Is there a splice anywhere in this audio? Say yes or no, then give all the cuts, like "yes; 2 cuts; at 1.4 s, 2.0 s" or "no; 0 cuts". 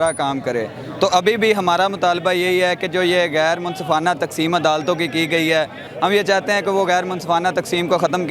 no; 0 cuts